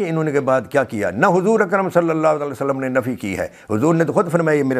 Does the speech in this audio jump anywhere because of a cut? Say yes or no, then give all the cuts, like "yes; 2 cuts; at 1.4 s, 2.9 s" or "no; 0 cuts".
no; 0 cuts